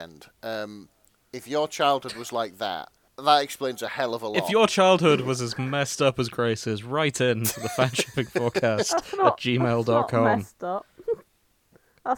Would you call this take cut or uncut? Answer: uncut